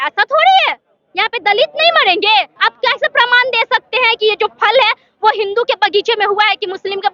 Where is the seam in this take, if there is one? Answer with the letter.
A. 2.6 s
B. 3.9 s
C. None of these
A